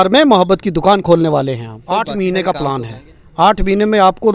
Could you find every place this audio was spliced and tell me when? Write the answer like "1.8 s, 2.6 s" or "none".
1.7 s